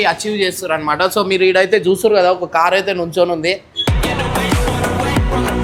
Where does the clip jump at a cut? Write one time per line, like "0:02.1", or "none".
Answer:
none